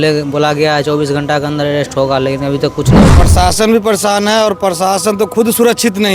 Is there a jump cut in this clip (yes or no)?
yes